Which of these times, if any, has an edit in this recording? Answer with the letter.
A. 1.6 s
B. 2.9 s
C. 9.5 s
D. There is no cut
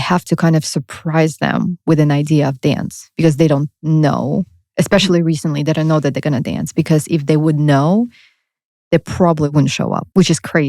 C